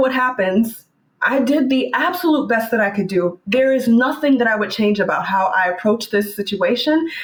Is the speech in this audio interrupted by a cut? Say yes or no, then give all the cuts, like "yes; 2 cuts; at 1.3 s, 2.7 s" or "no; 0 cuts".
no; 0 cuts